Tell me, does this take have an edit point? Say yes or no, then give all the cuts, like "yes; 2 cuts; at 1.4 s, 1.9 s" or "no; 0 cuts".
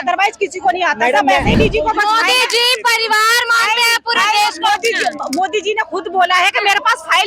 yes; 1 cut; at 1.6 s